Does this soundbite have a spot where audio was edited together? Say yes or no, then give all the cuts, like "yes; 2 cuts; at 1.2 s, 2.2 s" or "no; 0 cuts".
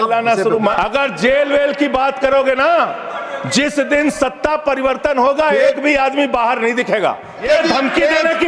yes; 2 cuts; at 0.7 s, 7.4 s